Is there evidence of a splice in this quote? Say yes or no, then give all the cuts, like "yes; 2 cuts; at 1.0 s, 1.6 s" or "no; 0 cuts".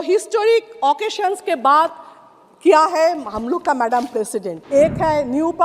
yes; 1 cut; at 4.6 s